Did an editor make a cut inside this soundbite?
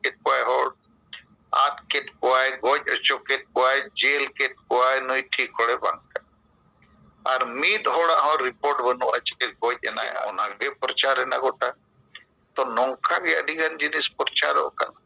yes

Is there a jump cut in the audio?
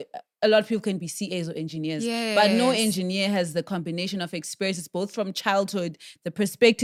no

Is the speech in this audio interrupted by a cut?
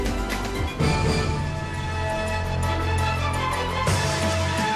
yes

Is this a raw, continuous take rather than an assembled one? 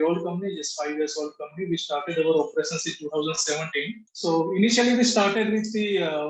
no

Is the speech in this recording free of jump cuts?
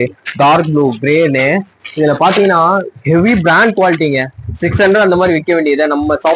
yes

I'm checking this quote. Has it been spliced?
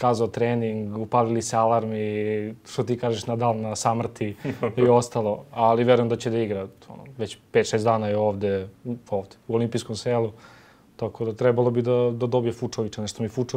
no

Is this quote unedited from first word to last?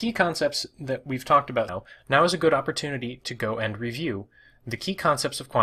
yes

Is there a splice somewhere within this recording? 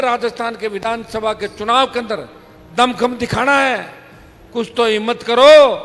no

